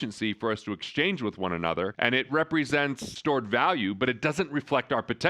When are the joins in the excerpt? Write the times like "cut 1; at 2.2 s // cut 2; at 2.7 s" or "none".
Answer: cut 1; at 3.1 s

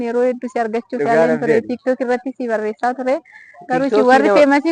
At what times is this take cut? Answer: none

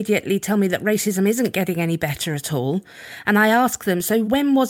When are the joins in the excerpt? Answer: none

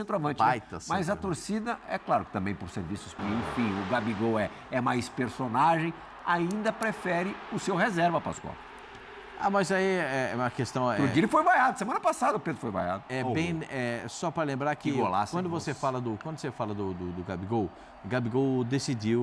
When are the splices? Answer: none

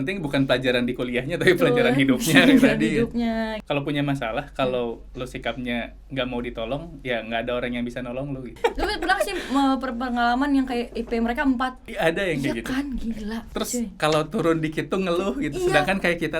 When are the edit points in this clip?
cut 1; at 3.6 s // cut 2; at 8.6 s // cut 3; at 11.8 s // cut 4; at 13.5 s

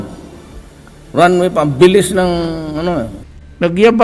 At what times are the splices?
cut 1; at 3.1 s

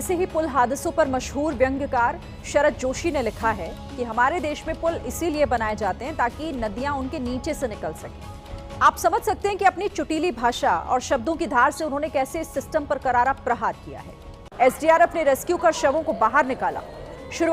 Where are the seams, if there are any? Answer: none

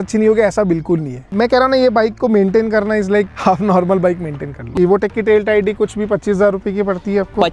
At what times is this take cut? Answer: cut 1; at 1.3 s // cut 2; at 4.7 s

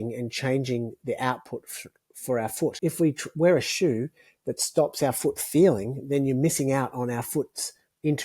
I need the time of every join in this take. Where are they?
cut 1; at 2.8 s

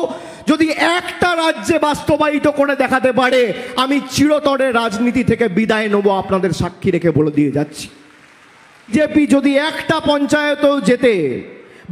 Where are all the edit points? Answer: cut 1; at 8.9 s

